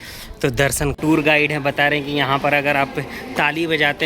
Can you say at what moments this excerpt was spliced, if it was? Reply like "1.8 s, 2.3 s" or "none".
1.0 s